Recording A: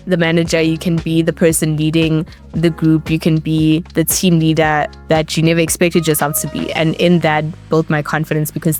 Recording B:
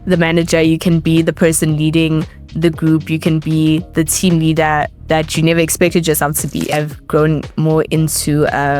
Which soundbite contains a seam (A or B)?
B